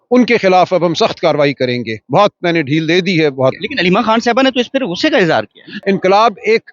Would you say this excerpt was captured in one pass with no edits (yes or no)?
no